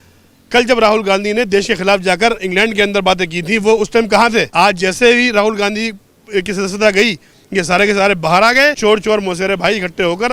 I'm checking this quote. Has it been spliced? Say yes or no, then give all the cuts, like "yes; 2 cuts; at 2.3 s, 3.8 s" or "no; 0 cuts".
yes; 2 cuts; at 4.5 s, 8.8 s